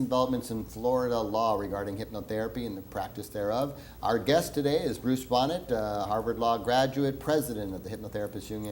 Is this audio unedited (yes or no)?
no